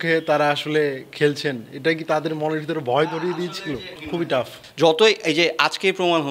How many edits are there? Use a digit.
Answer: 1